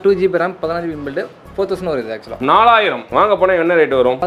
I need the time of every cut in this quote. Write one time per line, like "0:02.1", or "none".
0:03.1